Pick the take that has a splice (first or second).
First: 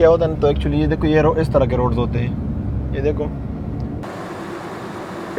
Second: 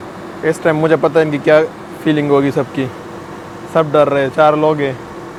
first